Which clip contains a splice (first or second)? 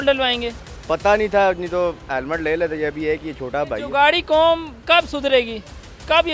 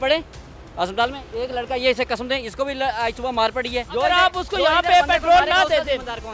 second